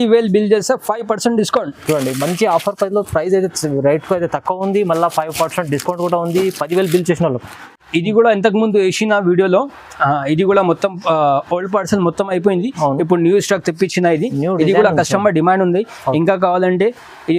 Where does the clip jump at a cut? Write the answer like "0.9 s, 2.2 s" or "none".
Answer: 7.7 s

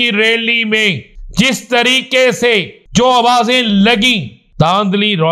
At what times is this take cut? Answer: 1.1 s, 2.8 s, 4.4 s

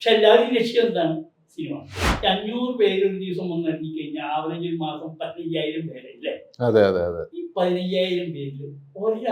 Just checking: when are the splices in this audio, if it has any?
2.0 s

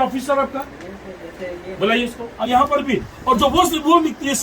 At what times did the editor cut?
2.3 s

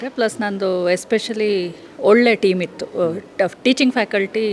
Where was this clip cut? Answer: none

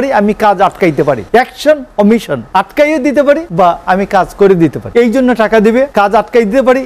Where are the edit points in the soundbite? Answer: 1.2 s, 2.4 s, 3.5 s, 4.8 s, 5.9 s

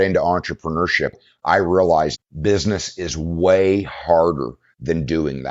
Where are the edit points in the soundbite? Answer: 1.2 s, 2.2 s

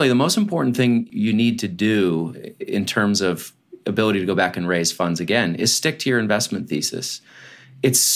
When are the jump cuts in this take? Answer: 1.1 s

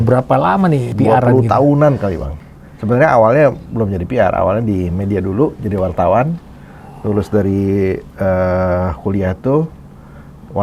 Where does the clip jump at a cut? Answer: 0.9 s, 2.3 s

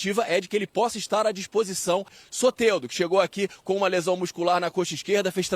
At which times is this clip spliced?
2.2 s

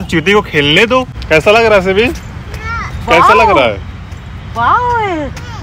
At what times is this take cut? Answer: 1.1 s

